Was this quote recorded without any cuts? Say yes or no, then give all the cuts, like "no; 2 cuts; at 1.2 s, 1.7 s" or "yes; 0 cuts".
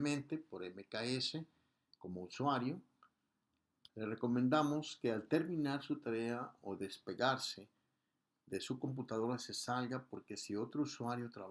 yes; 0 cuts